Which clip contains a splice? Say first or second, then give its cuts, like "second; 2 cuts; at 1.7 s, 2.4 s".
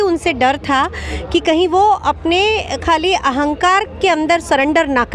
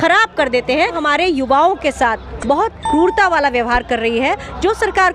second; 1 cut; at 1.0 s